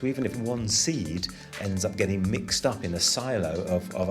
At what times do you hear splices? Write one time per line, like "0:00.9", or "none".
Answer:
0:01.4